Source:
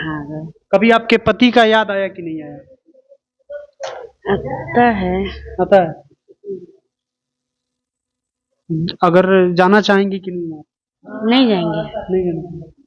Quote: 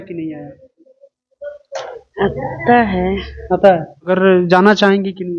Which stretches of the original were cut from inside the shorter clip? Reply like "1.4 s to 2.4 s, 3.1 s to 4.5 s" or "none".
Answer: 6.2 s to 9.2 s